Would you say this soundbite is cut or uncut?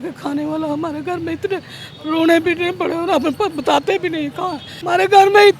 cut